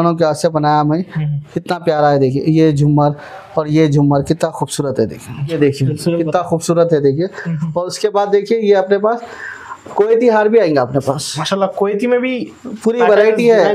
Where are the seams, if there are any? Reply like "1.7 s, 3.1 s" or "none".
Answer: 5.6 s